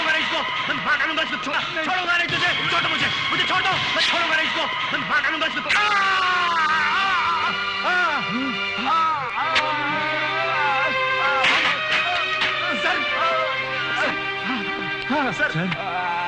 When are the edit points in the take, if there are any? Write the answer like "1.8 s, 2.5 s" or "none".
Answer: none